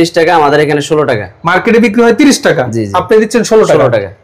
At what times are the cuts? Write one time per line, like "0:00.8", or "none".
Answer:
none